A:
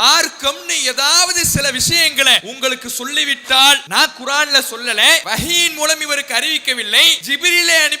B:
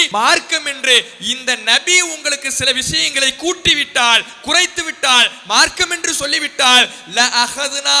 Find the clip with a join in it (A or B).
A